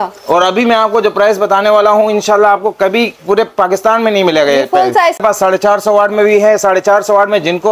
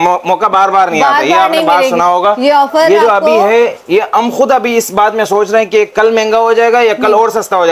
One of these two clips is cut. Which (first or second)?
first